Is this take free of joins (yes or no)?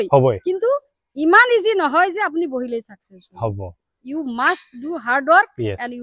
yes